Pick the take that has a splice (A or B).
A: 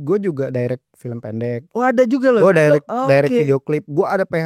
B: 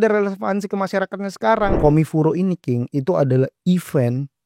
B